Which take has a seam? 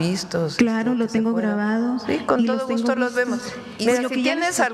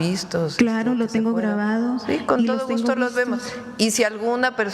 first; 1 cut; at 3.6 s

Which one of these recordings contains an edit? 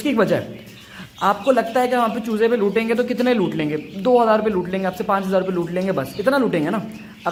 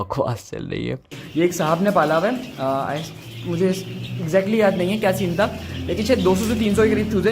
second; 1 cut; at 1.2 s

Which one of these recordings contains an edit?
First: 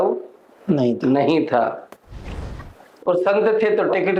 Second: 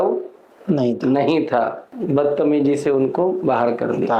second; 1 cut; at 1.9 s

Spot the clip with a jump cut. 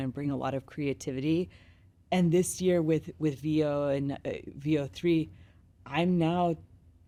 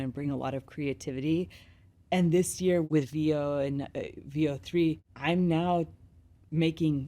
second; 2 cuts; at 2.8 s, 5.1 s

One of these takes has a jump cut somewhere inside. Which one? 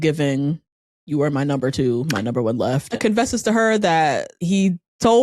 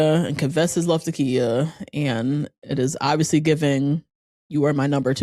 first; 2 cuts; at 3.0 s, 4.3 s

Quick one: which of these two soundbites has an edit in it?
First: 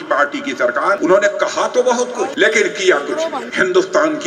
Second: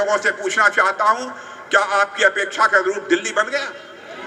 first; 3 cuts; at 1.0 s, 2.3 s, 3.4 s

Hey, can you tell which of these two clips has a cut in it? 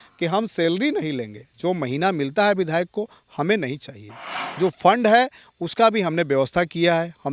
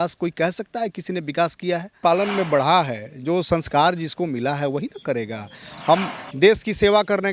second; 1 cut; at 2.0 s

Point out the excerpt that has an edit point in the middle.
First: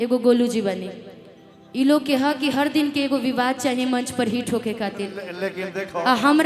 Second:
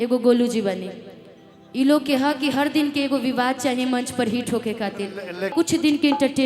second; 1 cut; at 5.5 s

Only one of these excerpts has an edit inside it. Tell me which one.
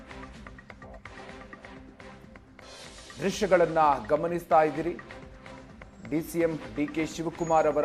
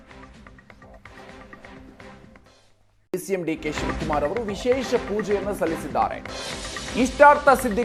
first; 1 cut; at 2.4 s

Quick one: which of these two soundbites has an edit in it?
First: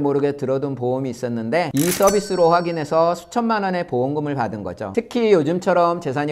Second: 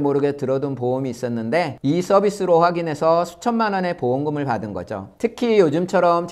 first; 2 cuts; at 1.7 s, 4.8 s

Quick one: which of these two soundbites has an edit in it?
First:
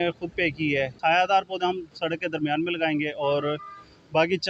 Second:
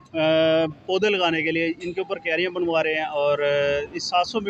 first; 1 cut; at 0.9 s

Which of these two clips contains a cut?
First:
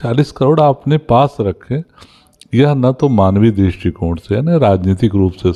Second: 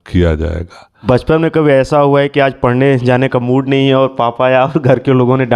second; 1 cut; at 0.9 s

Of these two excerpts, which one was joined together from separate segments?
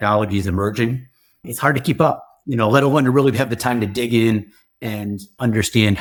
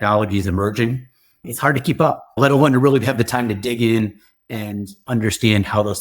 second; 1 cut; at 2.4 s

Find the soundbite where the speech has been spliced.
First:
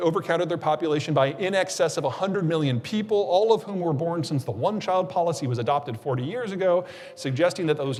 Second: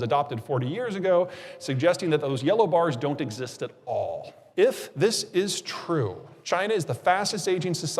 second; 2 cuts; at 4.4 s, 6.3 s

